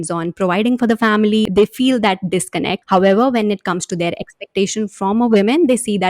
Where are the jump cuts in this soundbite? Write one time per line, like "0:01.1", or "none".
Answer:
0:01.4
0:02.8